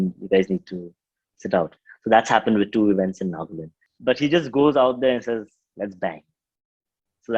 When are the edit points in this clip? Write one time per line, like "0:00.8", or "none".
0:03.8